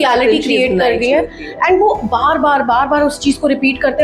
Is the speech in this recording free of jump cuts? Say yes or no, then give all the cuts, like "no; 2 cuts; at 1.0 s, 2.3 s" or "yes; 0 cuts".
yes; 0 cuts